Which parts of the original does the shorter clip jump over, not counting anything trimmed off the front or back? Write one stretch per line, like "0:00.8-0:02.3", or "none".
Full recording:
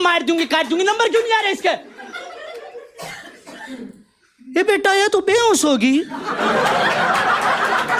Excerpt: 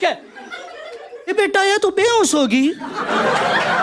0:02.9-0:04.6